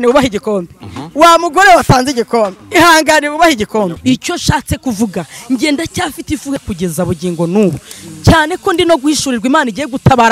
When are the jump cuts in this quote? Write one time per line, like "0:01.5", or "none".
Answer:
0:04.0
0:06.6